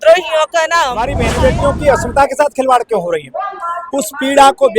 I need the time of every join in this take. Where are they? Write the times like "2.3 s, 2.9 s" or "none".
1.2 s